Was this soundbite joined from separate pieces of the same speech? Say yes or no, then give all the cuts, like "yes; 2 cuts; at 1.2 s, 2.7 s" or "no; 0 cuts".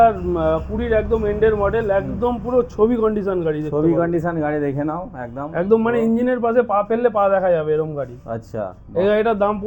no; 0 cuts